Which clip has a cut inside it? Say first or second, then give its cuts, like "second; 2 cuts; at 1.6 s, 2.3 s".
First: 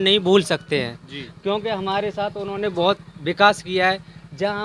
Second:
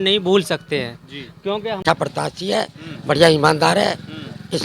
second; 1 cut; at 1.8 s